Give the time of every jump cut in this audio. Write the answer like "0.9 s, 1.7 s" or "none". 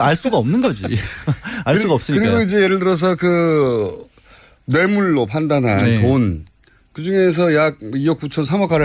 none